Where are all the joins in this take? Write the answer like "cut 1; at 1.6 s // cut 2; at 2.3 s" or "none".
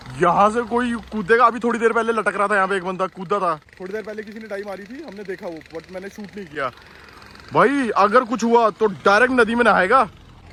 none